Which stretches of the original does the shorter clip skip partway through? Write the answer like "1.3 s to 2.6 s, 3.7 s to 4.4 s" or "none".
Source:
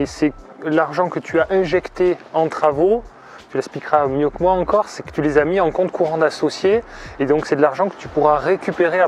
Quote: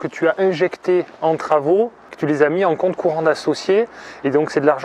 3.2 s to 5.0 s